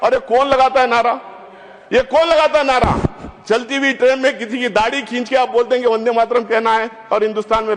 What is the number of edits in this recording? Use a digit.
0